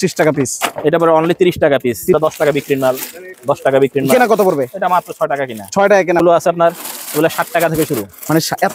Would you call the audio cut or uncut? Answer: cut